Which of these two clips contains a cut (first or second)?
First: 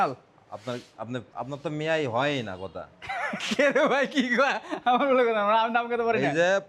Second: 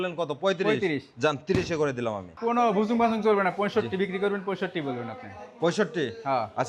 second